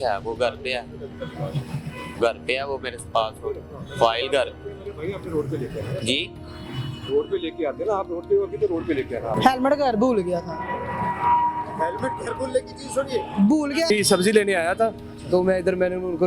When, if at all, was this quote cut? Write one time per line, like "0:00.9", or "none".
0:09.3
0:13.9